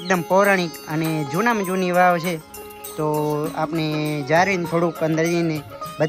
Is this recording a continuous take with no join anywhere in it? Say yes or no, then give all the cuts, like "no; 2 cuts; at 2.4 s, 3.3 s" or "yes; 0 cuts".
yes; 0 cuts